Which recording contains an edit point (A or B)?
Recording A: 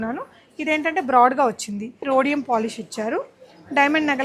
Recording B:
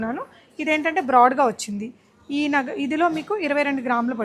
A